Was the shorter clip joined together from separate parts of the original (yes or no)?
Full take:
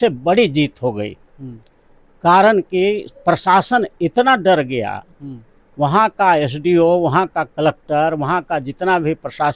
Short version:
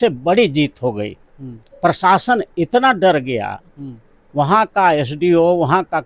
yes